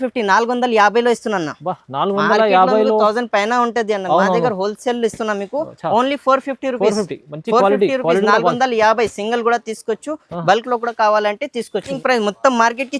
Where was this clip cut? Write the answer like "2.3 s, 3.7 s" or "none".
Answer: 12.0 s

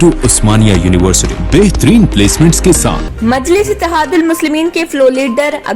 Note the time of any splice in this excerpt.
3.0 s

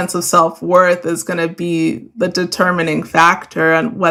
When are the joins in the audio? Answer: none

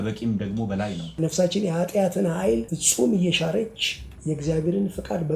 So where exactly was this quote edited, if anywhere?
1.1 s, 2.8 s

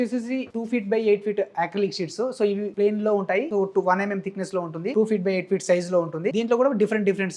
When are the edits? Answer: 3.5 s, 4.9 s, 6.3 s

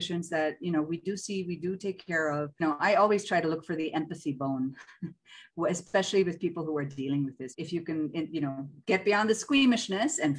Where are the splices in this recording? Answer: 2.6 s, 7.5 s

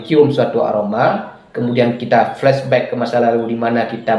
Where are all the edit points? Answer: none

